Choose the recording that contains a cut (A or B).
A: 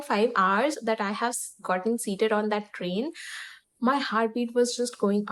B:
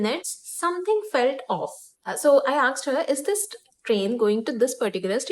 B